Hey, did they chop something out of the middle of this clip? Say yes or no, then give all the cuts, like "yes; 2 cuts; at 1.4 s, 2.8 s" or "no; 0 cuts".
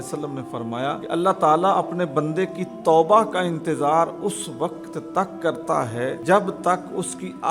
yes; 2 cuts; at 1.0 s, 6.2 s